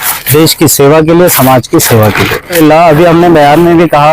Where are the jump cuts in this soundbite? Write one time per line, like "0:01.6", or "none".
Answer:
0:02.5